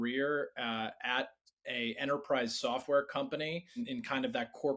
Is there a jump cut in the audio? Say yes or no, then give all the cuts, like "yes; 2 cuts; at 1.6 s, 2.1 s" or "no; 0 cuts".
yes; 1 cut; at 3.8 s